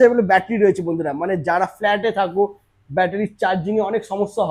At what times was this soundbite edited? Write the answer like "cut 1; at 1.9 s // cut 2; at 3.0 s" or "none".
none